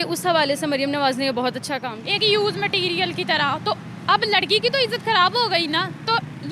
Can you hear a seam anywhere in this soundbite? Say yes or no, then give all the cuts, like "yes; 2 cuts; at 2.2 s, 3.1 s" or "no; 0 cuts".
yes; 1 cut; at 1.9 s